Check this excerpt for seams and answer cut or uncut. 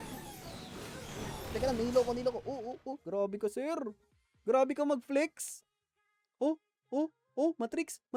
uncut